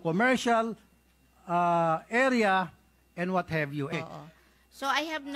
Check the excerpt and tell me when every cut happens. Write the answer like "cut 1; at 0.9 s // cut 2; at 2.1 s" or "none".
cut 1; at 3.9 s